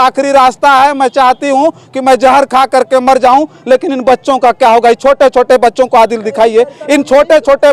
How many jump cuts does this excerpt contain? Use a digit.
0